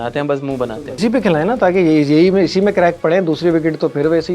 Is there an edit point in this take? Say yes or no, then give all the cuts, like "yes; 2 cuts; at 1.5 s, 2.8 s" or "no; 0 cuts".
yes; 1 cut; at 1.0 s